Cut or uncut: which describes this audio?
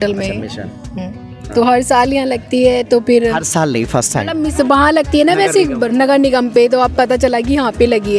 uncut